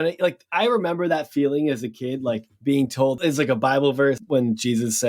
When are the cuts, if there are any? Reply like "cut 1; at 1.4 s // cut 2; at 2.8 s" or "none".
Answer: cut 1; at 3.0 s // cut 2; at 4.2 s